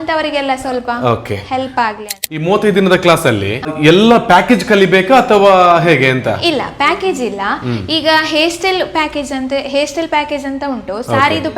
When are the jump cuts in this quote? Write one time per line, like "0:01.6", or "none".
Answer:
0:02.2
0:03.8